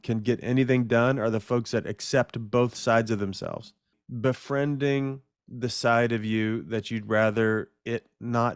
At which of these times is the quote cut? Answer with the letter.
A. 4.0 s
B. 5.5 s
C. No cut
A